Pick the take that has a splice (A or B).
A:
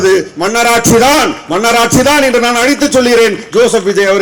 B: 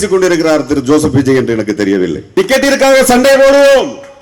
B